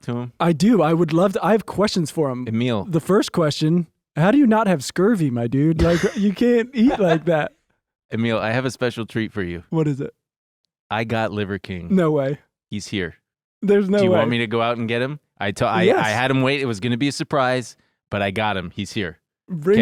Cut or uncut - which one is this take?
uncut